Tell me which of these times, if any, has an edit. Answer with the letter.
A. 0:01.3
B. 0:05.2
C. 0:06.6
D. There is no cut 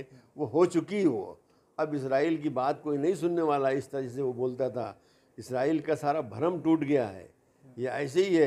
D